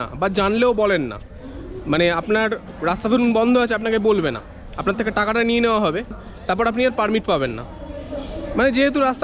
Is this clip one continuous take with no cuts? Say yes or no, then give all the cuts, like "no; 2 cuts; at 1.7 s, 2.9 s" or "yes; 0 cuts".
no; 1 cut; at 6.2 s